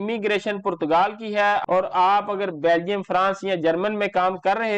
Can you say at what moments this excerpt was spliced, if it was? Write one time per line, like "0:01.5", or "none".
0:01.6